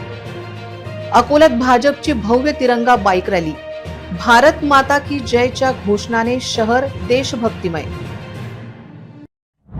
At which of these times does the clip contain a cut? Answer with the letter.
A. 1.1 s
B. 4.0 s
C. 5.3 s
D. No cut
A